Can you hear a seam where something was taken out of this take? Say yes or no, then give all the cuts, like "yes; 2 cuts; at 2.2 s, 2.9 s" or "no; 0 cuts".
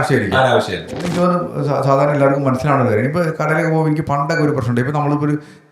yes; 1 cut; at 1.0 s